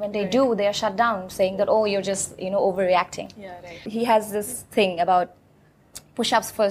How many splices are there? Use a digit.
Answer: 1